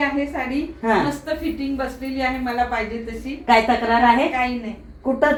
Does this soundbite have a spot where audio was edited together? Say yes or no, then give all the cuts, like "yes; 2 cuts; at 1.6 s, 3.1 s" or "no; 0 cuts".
no; 0 cuts